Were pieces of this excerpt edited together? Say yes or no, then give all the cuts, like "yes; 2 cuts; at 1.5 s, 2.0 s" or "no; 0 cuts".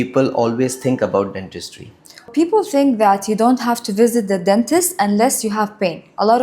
yes; 1 cut; at 2.3 s